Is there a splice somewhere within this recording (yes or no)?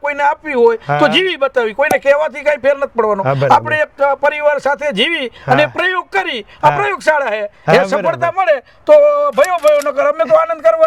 no